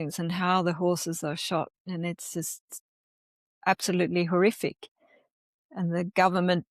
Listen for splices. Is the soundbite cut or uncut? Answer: uncut